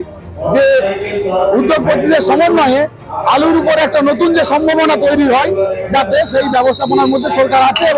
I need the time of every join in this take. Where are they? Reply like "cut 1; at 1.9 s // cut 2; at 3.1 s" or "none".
none